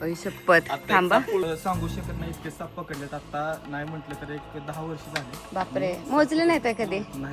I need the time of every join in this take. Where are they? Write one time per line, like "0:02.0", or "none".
0:01.4